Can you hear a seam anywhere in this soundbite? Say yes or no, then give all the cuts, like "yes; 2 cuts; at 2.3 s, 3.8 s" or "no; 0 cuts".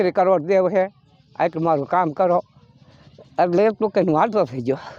no; 0 cuts